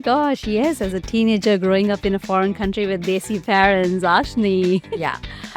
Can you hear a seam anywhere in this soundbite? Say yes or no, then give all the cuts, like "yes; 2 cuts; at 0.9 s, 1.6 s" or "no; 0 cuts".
no; 0 cuts